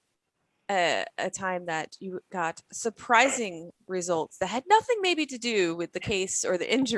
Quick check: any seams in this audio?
no; 0 cuts

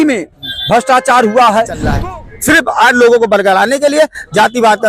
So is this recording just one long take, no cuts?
no; 1 cut; at 1.8 s

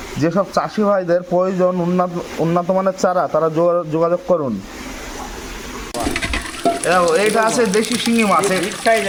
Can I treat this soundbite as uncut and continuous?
yes; 0 cuts

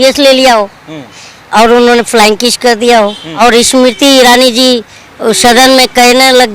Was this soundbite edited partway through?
yes; 1 cut; at 3.2 s

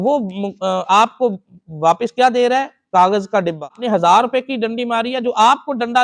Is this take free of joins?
no; 1 cut; at 3.8 s

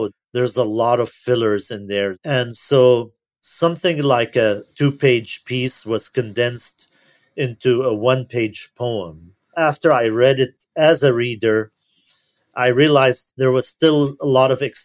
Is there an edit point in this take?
yes; 1 cut; at 2.2 s

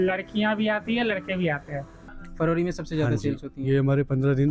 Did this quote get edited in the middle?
yes; 1 cut; at 2.1 s

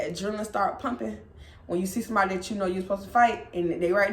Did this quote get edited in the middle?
no; 0 cuts

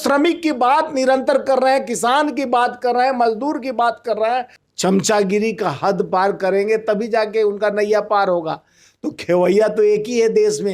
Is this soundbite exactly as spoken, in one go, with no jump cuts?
no; 1 cut; at 4.6 s

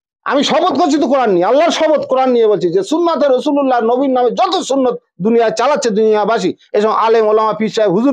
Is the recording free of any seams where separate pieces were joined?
yes; 0 cuts

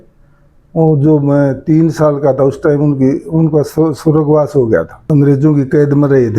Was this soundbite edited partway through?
yes; 1 cut; at 5.1 s

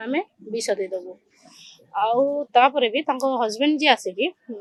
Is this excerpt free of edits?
yes; 0 cuts

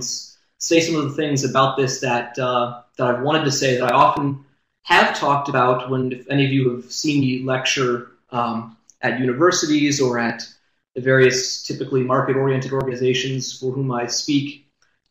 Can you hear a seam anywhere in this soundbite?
yes; 1 cut; at 5.1 s

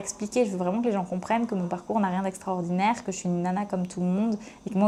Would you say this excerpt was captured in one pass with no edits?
yes; 0 cuts

